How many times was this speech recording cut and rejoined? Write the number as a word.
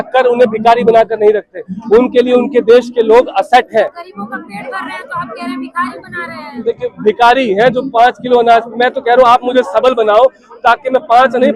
zero